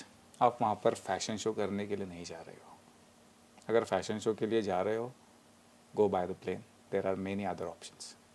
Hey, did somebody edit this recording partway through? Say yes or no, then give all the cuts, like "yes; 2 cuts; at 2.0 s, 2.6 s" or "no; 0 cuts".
no; 0 cuts